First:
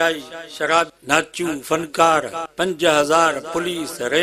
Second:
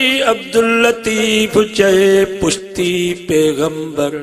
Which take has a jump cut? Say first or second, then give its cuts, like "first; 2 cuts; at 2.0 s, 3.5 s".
first; 2 cuts; at 0.9 s, 2.4 s